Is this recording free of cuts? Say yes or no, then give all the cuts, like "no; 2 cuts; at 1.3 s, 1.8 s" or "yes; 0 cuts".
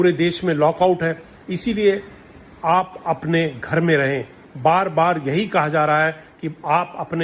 yes; 0 cuts